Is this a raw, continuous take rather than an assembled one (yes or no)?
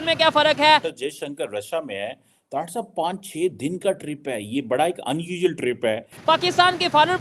no